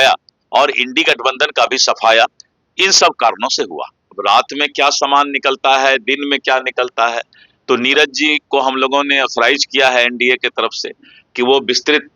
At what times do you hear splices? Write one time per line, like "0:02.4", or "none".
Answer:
0:04.1